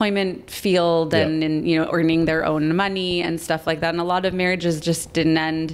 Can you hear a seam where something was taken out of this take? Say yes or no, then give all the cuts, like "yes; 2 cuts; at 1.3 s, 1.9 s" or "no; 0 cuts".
no; 0 cuts